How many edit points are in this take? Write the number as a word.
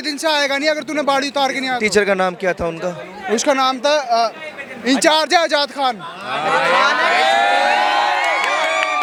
zero